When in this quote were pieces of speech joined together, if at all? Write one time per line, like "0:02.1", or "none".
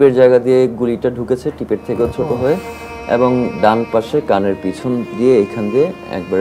none

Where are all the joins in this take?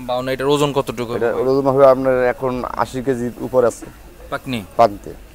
none

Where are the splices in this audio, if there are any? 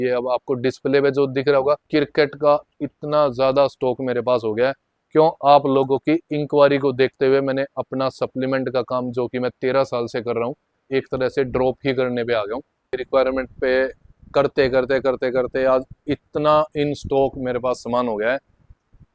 0:01.8
0:10.8
0:12.9

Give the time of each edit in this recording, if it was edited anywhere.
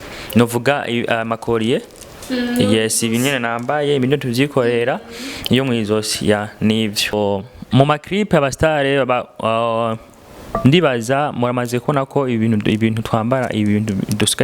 0:07.1

